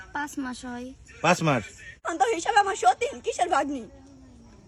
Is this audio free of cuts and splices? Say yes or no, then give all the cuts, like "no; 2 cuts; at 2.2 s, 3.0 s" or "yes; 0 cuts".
no; 1 cut; at 2.1 s